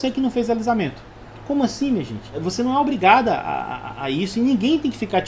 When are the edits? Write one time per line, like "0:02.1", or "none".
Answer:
0:02.4